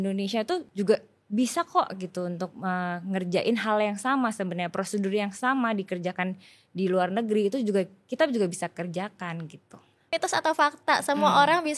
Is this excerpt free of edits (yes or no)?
no